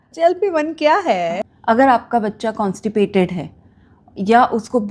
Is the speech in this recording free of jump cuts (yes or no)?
no